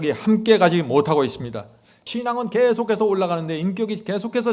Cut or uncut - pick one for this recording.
cut